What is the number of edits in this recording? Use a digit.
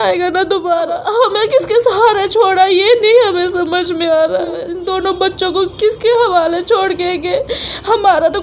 2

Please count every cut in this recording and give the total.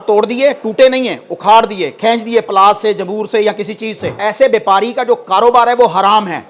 1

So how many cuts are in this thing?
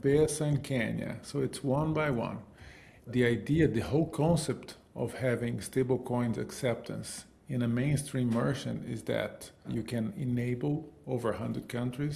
2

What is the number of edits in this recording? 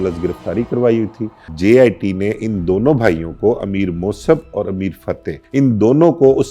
2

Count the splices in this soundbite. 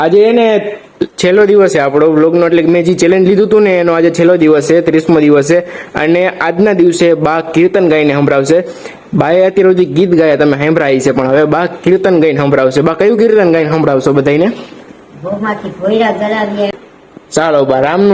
1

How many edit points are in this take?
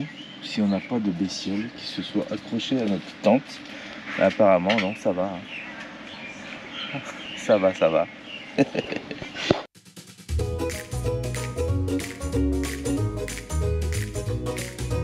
0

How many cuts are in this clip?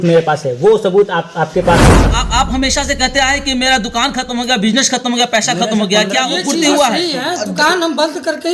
1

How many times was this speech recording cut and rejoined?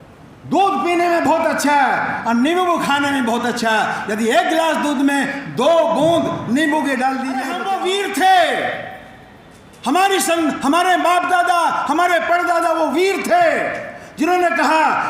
1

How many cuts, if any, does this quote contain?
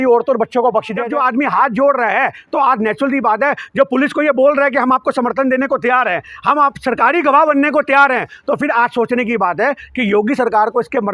1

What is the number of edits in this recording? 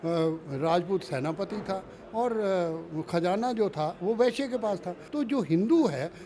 1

